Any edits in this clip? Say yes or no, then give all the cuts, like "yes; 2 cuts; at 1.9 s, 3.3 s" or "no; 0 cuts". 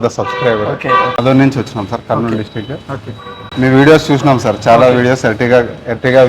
yes; 1 cut; at 1.2 s